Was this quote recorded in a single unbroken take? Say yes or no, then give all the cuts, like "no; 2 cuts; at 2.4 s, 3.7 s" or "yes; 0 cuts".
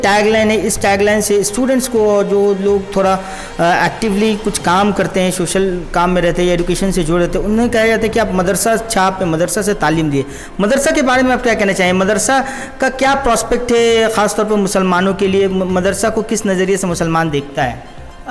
yes; 0 cuts